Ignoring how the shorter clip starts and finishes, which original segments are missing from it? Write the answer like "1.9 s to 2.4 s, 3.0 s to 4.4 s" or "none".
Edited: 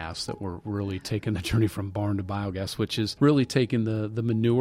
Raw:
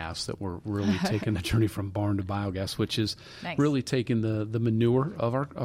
3.1 s to 3.5 s